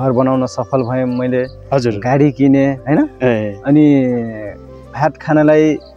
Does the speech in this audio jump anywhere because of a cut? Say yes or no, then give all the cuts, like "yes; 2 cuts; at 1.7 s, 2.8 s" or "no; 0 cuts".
no; 0 cuts